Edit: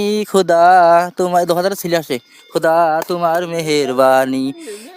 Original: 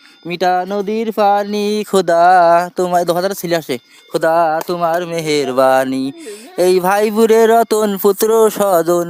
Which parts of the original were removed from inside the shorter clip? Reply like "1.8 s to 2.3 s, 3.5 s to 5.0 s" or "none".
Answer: none